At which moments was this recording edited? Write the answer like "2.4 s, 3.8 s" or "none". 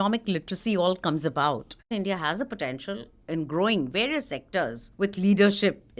1.9 s, 4.8 s